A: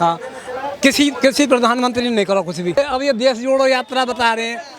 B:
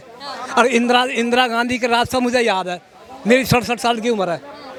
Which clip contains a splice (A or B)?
A